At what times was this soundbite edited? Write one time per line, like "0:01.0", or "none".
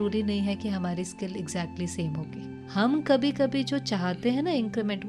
0:02.5